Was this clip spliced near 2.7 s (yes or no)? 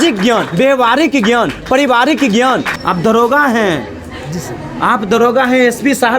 yes